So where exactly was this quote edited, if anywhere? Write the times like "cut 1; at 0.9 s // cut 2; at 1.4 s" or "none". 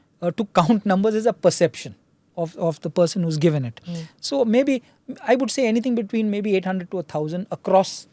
none

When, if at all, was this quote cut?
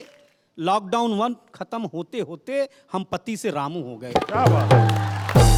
none

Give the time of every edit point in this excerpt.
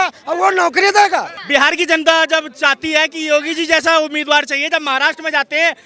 cut 1; at 1.4 s

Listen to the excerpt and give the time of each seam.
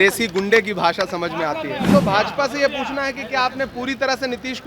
cut 1; at 1.9 s

